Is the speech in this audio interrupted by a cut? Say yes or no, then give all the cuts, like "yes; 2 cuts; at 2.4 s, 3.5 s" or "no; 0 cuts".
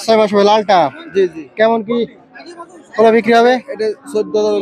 no; 0 cuts